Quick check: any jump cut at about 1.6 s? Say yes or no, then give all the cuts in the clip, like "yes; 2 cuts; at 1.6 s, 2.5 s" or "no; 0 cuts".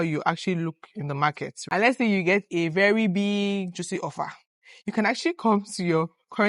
yes; 1 cut; at 1.6 s